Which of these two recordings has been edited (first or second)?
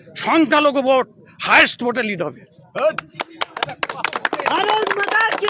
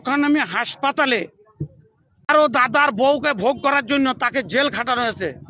second